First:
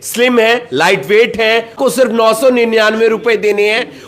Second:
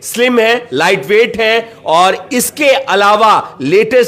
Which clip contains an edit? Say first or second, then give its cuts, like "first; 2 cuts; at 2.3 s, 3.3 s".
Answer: first; 1 cut; at 1.8 s